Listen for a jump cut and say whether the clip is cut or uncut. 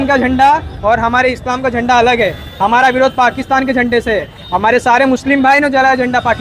uncut